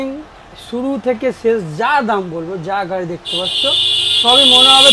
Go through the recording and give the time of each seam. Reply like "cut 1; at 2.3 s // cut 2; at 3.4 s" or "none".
none